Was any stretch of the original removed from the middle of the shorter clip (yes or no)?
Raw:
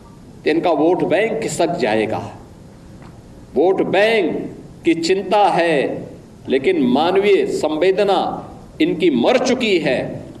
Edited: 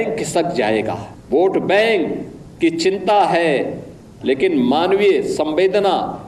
yes